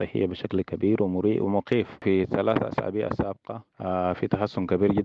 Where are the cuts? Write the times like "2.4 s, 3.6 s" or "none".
2.0 s